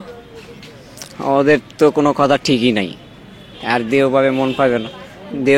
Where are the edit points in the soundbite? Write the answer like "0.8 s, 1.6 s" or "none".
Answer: 3.0 s